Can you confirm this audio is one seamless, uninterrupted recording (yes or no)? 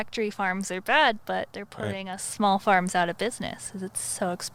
yes